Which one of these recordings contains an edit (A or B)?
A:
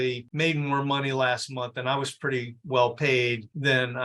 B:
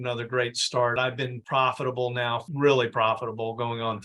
B